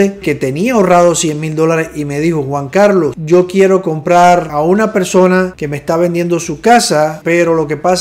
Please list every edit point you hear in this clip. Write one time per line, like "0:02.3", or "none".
0:03.2
0:04.5
0:05.6
0:07.2